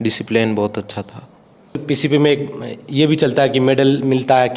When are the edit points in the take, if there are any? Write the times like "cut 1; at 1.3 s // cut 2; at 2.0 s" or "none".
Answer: cut 1; at 1.8 s